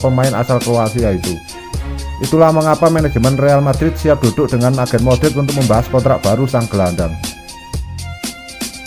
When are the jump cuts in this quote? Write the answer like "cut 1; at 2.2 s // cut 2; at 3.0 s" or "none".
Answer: cut 1; at 7.1 s